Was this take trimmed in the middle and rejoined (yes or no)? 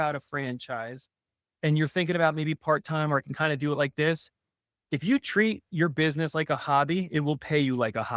no